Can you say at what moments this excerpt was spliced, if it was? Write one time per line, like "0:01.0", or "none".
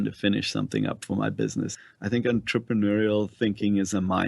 0:01.8